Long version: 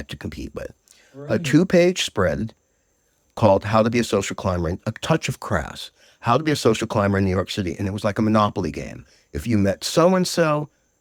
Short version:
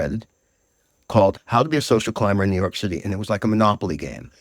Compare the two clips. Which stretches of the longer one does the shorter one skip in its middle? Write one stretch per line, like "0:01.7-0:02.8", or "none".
0:03.7-0:06.1